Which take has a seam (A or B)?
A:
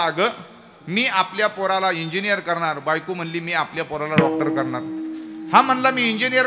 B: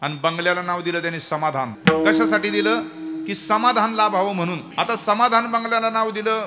B